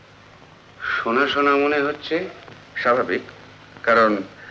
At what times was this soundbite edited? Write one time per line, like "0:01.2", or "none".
none